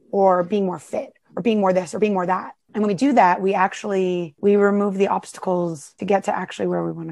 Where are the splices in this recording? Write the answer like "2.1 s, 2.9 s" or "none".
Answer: 2.6 s, 4.3 s, 5.9 s

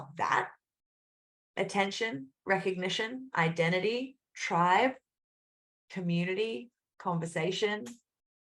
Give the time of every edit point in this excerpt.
none

